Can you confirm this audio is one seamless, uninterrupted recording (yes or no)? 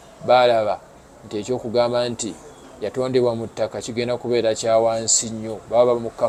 yes